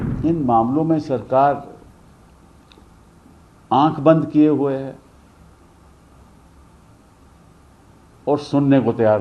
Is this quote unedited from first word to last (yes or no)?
yes